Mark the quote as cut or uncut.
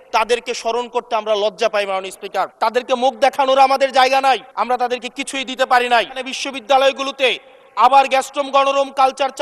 cut